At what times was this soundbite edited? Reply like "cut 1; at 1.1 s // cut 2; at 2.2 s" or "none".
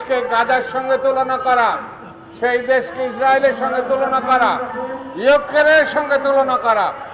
none